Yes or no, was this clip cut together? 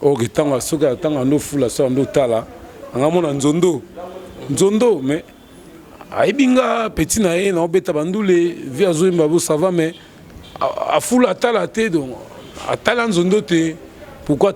no